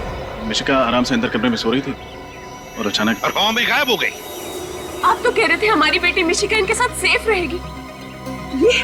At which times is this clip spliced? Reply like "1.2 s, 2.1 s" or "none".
none